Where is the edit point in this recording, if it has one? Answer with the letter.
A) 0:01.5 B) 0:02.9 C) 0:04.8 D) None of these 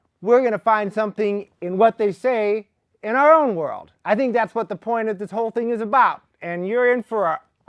C